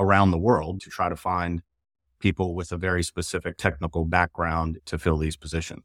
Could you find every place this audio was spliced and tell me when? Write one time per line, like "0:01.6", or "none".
0:00.8
0:03.5
0:04.8